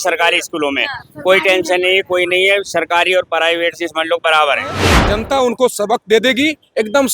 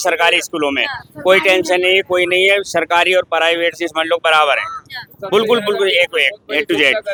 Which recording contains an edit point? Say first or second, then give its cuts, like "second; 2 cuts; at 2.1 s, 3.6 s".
first; 1 cut; at 4.9 s